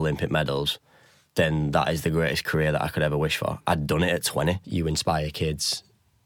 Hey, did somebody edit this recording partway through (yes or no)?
yes